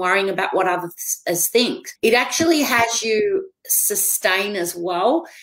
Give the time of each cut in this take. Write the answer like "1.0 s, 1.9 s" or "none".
1.8 s